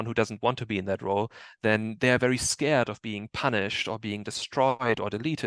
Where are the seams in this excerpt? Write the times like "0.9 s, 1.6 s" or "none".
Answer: none